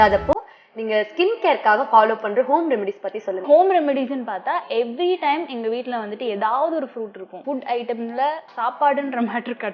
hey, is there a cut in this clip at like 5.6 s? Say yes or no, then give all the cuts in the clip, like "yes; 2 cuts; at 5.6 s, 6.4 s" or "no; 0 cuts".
no; 3 cuts; at 3.3 s, 7.4 s, 8.5 s